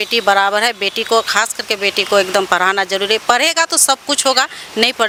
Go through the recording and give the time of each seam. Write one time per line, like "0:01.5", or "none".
none